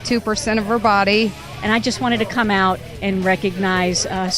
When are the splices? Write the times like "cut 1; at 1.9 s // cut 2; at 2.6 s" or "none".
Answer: cut 1; at 1.5 s